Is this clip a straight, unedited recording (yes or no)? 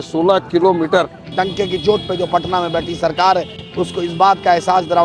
no